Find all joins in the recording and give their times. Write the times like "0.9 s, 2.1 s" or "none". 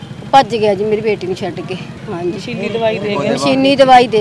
1.9 s